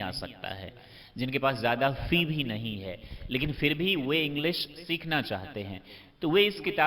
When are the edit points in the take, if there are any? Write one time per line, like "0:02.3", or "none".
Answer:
none